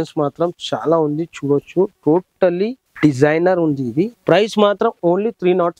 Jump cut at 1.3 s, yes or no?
no